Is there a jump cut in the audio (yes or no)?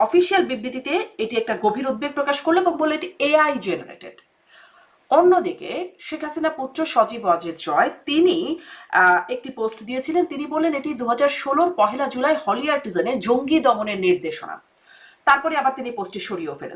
no